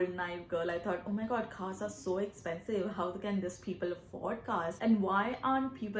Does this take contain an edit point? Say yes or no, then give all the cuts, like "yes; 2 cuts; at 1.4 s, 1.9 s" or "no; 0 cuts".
no; 0 cuts